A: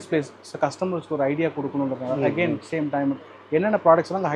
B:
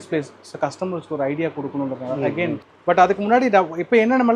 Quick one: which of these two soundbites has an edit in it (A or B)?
B